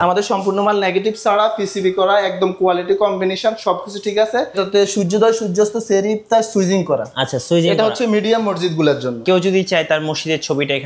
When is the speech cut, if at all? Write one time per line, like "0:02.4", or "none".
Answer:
0:04.6
0:09.2